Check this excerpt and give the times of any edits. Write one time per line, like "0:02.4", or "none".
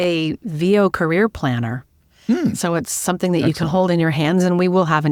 none

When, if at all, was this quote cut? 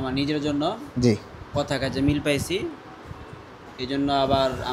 none

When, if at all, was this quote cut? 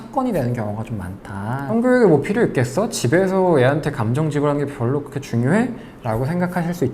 0:01.6

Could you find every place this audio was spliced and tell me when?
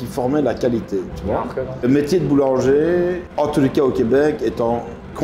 0:01.8
0:03.2

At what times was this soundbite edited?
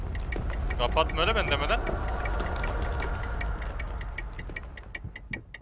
none

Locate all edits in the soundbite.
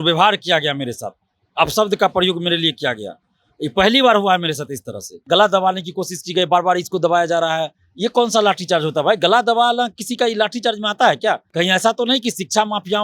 0:05.1
0:11.5

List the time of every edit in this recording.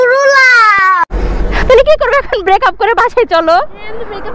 0:01.2

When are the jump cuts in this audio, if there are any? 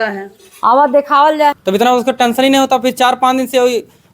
0:01.6

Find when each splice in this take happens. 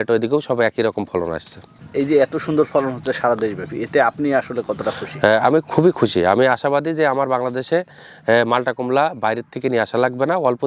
none

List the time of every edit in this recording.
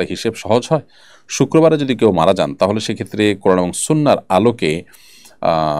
none

